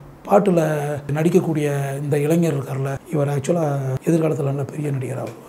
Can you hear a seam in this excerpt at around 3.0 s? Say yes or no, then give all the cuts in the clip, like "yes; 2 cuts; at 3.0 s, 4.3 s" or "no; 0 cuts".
yes; 3 cuts; at 1.1 s, 3.0 s, 3.9 s